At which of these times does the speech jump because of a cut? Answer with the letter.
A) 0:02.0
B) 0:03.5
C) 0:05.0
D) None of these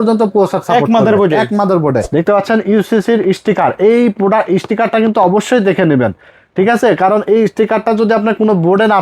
A